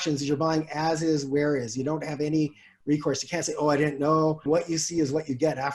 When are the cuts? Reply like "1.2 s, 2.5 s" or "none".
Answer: 4.5 s